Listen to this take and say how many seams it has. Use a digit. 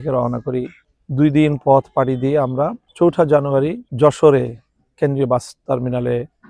0